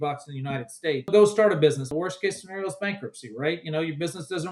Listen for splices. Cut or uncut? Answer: cut